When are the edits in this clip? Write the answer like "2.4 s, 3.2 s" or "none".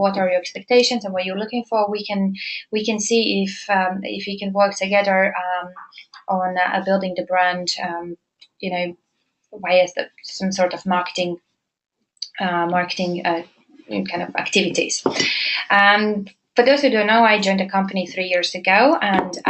3.3 s